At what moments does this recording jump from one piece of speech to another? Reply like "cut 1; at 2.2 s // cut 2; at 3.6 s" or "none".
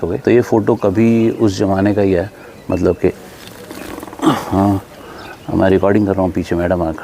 none